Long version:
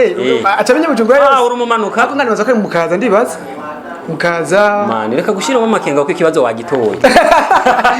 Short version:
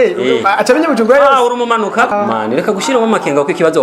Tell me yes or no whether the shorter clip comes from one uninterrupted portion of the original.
no